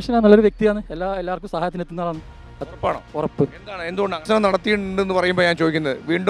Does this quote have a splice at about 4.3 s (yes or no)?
yes